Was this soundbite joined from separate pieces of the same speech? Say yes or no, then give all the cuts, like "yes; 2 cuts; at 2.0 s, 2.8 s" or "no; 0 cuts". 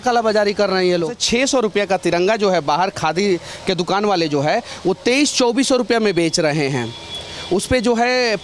yes; 1 cut; at 1.2 s